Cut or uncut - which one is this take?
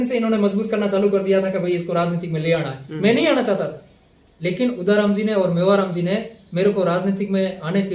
uncut